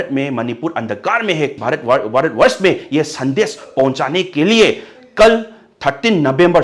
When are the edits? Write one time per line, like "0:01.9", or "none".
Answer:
0:01.6